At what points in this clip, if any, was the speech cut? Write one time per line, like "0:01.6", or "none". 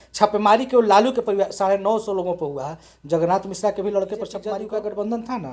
0:04.4